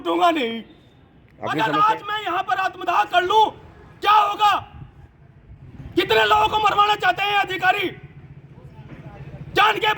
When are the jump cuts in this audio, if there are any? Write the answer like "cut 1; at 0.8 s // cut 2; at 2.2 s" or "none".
cut 1; at 1.4 s